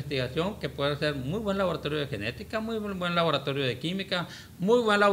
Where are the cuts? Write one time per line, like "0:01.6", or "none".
none